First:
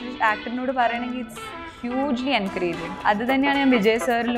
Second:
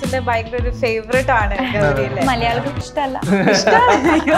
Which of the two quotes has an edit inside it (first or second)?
first